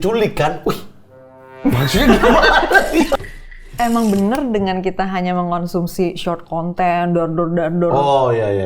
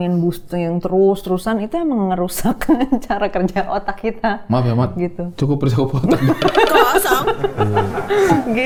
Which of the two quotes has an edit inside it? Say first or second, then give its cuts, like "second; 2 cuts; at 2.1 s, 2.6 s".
first; 1 cut; at 3.3 s